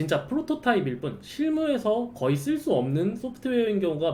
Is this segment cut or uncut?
uncut